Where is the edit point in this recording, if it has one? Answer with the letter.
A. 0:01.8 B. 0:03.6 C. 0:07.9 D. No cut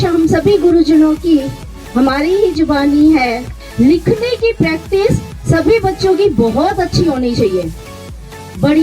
B